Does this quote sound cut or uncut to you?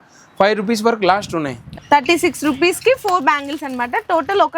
cut